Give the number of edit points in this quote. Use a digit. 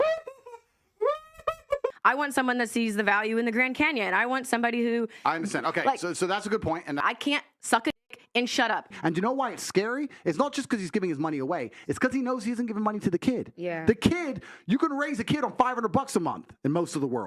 3